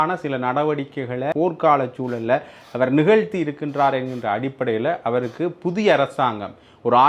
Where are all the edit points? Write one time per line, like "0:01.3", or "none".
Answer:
0:01.3